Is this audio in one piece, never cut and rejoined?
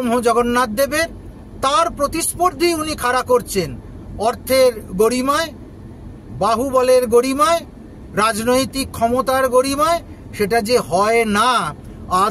yes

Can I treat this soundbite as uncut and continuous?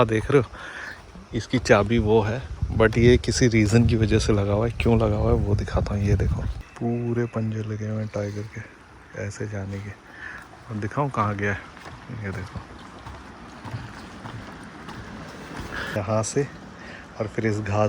no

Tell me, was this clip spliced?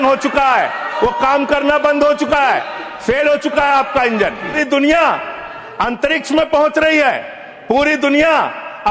yes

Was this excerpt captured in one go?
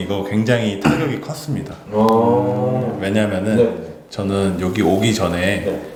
yes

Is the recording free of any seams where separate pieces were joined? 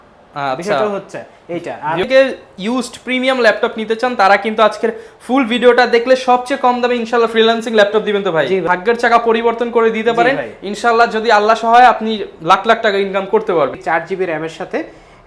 no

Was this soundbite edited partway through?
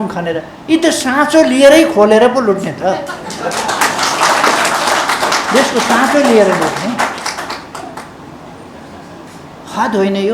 no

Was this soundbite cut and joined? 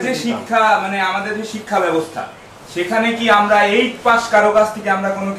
no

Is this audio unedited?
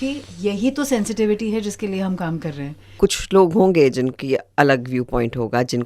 no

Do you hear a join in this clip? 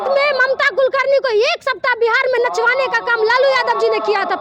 no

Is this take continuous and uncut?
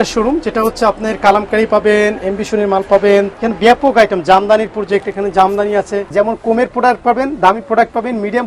no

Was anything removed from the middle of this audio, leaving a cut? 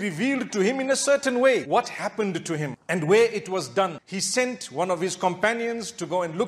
yes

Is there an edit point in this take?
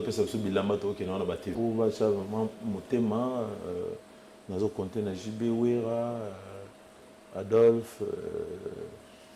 yes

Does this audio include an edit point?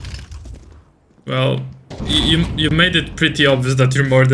yes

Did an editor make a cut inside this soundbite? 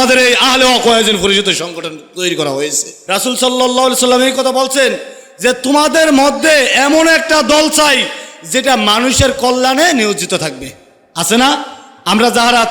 yes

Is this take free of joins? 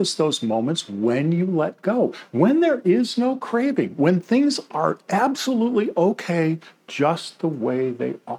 yes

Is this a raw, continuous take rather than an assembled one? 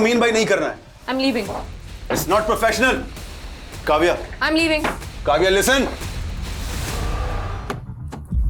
no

